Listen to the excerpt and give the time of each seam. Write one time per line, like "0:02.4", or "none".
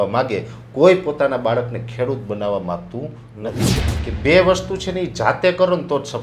0:03.6